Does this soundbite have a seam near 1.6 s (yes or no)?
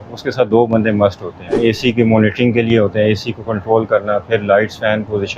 yes